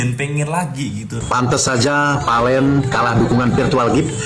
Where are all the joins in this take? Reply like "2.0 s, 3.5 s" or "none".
1.2 s